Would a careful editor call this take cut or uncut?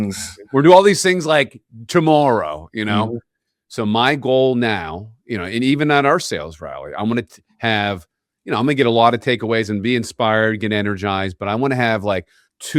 uncut